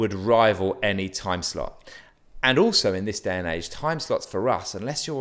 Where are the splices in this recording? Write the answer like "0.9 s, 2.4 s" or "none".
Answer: none